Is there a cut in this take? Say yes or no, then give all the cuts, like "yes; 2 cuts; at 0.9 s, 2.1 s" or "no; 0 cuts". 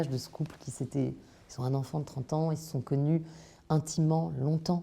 no; 0 cuts